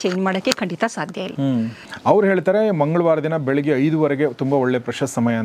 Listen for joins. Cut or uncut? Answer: cut